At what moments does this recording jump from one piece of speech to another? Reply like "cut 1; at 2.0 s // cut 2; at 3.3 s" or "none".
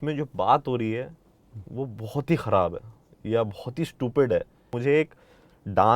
cut 1; at 4.7 s